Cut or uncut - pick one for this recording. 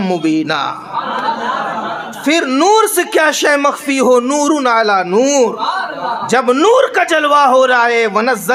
uncut